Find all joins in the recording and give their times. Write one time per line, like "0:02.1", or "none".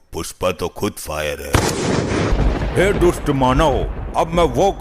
0:02.3